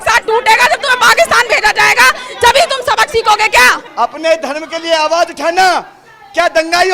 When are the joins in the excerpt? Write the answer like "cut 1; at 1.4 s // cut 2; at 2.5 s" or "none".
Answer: cut 1; at 3.8 s